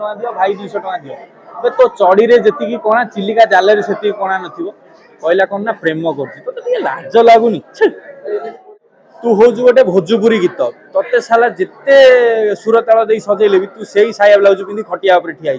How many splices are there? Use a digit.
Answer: 1